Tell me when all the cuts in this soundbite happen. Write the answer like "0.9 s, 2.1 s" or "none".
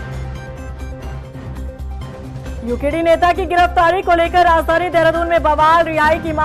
1.1 s